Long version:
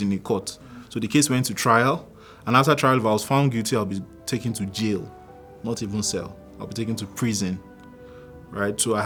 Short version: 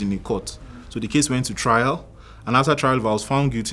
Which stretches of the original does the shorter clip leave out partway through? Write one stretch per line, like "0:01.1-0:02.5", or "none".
none

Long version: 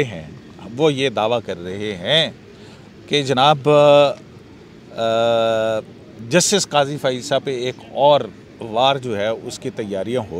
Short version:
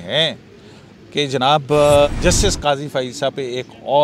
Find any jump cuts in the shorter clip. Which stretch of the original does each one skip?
0:04.0-0:06.2

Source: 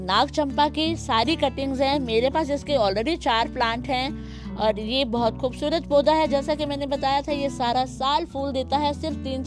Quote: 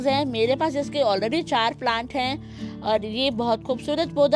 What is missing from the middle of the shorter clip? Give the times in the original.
none

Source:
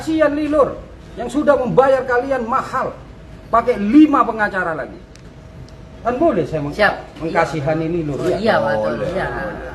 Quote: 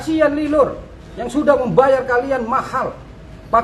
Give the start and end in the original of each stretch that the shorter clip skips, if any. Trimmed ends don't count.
none

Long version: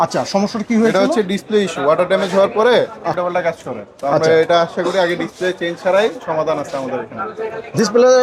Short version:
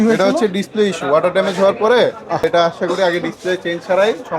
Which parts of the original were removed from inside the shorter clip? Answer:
0:03.2-0:04.4

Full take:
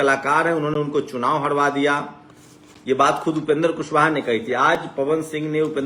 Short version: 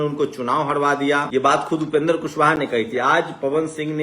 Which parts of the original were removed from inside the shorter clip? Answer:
0:02.0-0:02.8

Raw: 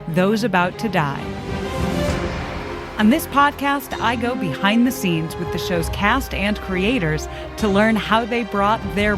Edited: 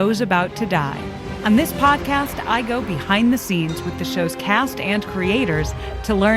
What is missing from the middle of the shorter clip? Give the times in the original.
0:01.5-0:02.8

